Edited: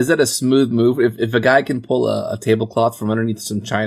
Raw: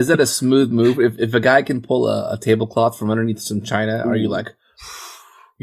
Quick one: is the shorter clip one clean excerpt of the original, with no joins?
yes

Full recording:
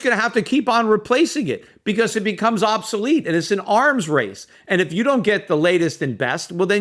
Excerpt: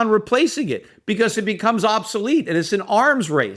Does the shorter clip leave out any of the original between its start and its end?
no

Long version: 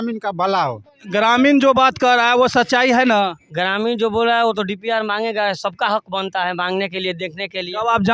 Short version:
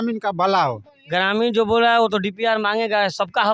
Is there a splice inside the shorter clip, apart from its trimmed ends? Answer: yes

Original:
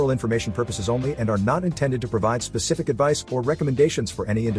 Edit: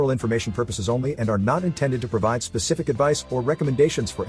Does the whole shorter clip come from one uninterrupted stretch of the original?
yes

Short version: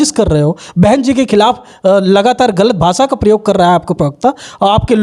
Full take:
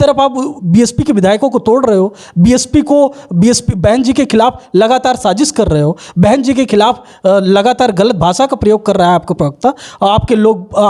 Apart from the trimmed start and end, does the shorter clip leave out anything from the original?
no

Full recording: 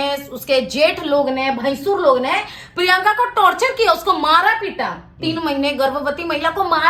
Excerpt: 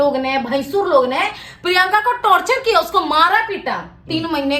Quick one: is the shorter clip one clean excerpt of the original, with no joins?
yes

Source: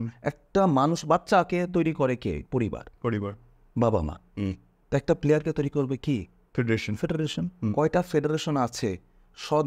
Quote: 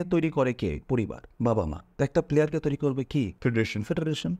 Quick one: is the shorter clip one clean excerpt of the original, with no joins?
no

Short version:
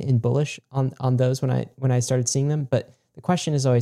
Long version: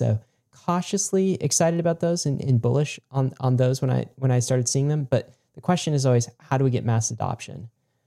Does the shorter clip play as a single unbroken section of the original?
yes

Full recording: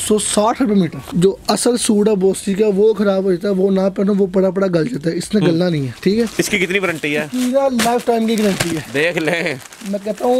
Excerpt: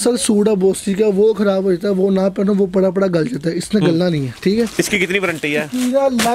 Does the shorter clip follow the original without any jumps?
yes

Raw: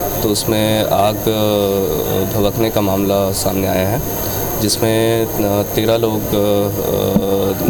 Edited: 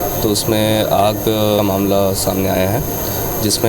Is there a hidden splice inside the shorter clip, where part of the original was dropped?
yes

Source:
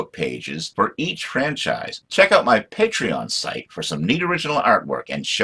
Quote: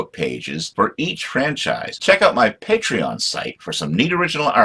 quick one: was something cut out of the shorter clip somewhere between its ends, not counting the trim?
yes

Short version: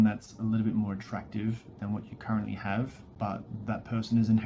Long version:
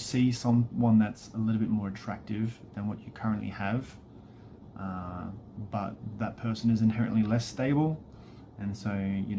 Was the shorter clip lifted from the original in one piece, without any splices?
no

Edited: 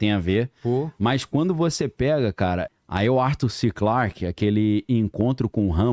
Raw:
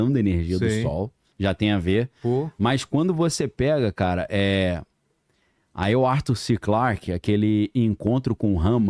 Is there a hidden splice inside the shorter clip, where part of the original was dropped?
yes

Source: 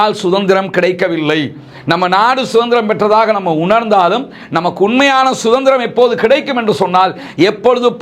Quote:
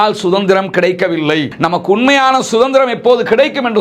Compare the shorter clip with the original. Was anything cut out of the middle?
yes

